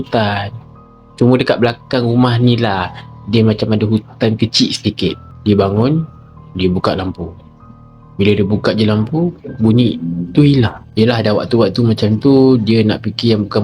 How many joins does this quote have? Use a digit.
1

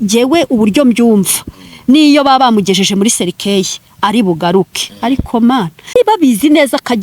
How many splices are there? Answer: 1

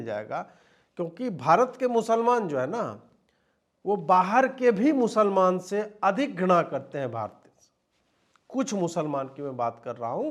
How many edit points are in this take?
0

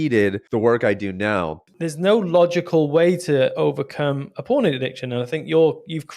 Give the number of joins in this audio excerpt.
1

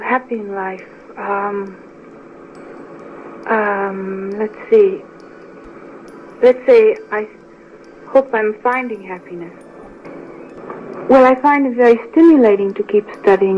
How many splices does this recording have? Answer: 2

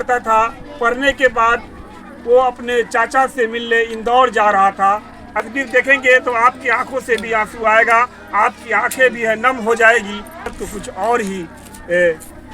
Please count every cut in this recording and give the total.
2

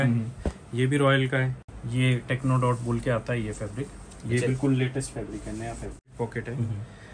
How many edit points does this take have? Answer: 2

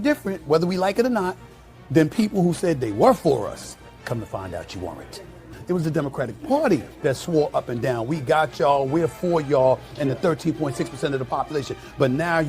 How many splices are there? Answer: 1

